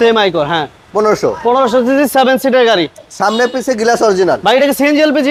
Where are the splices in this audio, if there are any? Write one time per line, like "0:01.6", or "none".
none